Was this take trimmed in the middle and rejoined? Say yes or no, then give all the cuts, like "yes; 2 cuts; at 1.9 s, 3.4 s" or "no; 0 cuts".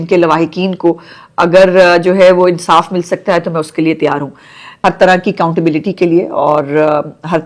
yes; 1 cut; at 4.7 s